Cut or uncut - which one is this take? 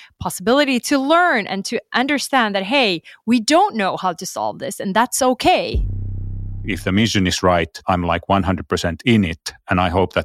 cut